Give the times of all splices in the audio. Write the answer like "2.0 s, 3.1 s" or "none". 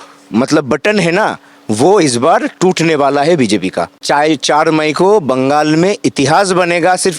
3.9 s